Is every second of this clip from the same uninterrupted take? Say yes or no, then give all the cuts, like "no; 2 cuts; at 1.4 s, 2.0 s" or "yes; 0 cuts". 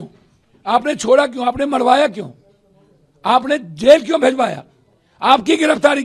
yes; 0 cuts